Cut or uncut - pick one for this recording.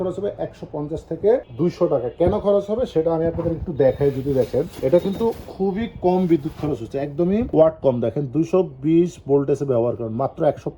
uncut